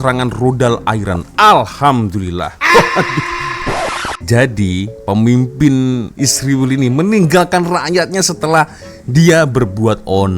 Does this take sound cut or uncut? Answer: cut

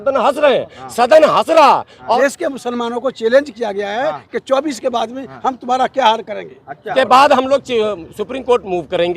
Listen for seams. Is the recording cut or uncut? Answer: cut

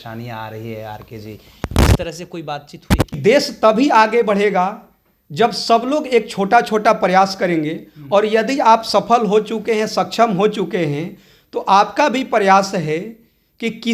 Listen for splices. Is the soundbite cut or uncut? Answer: cut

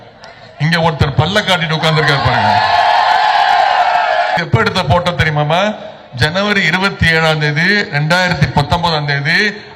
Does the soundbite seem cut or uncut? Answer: cut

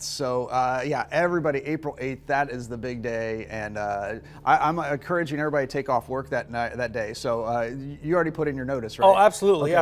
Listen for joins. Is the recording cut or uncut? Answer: cut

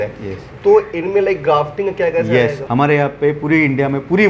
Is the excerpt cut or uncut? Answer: cut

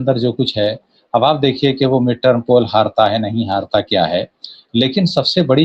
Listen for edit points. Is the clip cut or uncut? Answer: uncut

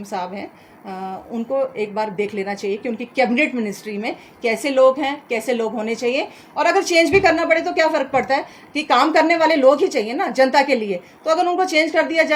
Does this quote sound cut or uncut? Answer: uncut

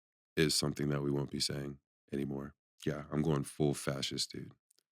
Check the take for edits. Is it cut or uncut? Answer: cut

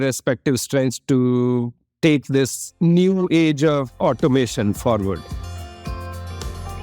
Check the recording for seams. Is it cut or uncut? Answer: cut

